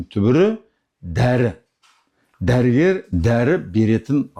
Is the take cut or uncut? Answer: uncut